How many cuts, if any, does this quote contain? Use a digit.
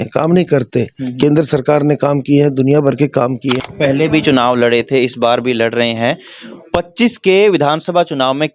1